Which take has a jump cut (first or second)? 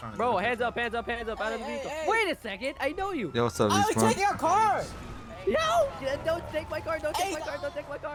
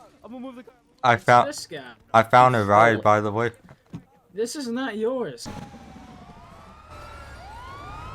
second